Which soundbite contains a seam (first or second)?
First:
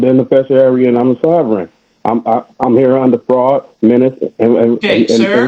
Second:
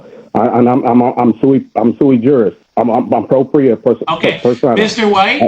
second